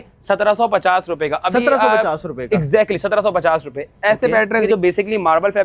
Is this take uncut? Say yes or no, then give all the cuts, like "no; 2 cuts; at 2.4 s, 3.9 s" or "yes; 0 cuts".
yes; 0 cuts